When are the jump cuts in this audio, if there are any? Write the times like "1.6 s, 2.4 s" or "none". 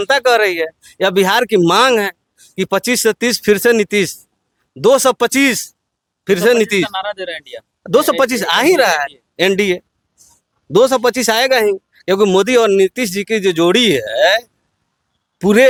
none

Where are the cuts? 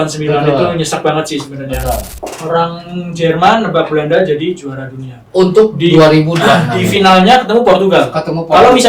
2.2 s

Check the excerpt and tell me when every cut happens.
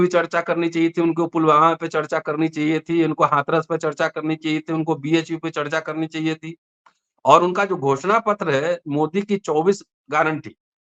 none

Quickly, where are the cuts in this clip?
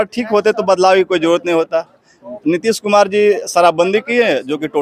none

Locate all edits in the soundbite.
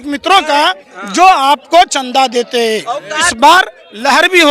3.2 s

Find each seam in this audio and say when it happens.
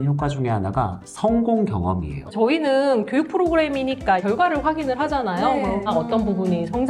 2.3 s, 5.9 s

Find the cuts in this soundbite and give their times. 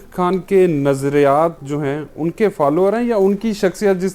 none

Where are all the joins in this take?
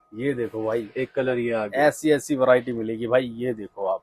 none

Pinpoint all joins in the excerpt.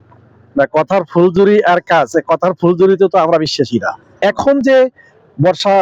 4.2 s

